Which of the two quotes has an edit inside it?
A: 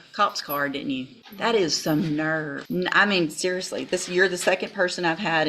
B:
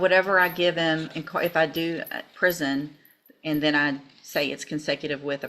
A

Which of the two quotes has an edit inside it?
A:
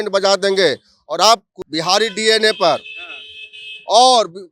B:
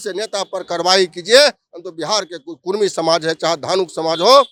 A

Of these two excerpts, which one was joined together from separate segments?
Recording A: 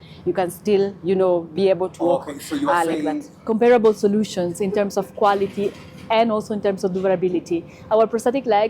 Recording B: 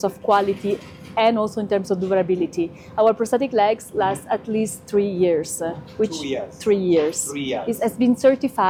A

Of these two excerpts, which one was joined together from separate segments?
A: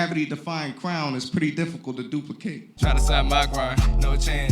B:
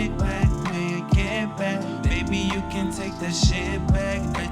A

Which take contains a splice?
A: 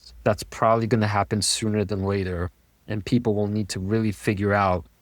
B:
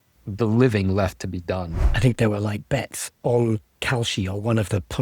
B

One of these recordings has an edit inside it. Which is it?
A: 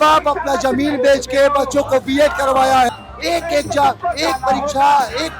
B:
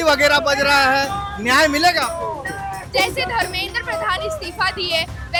A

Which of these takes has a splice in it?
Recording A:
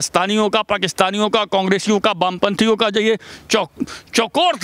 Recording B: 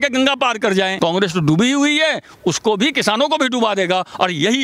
B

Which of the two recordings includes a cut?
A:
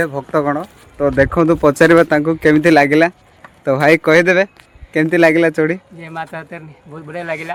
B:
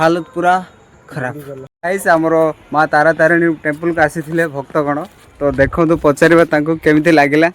B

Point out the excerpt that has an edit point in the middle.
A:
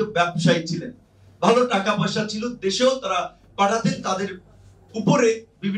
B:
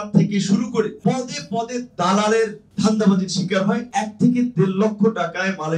B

